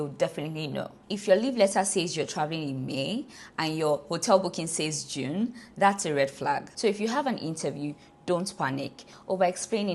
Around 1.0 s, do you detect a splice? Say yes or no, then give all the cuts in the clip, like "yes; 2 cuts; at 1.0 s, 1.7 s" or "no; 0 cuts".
yes; 2 cuts; at 1.0 s, 6.7 s